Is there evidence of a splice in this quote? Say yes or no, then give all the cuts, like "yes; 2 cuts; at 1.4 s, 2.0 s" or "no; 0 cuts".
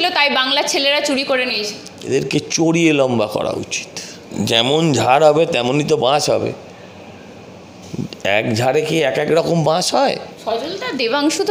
yes; 3 cuts; at 1.9 s, 4.3 s, 10.3 s